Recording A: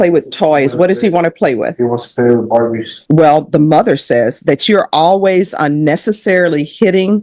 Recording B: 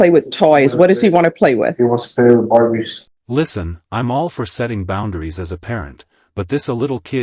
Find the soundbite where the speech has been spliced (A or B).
A